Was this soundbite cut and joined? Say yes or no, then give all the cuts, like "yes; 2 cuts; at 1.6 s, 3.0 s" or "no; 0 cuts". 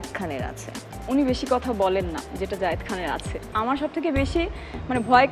yes; 1 cut; at 3.5 s